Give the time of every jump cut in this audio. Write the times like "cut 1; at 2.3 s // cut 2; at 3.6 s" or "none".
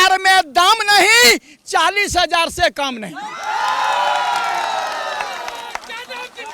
none